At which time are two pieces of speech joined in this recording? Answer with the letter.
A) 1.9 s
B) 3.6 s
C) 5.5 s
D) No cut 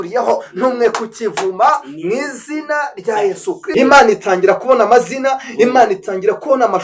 B